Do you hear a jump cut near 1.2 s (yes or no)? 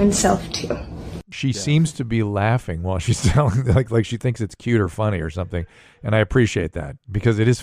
yes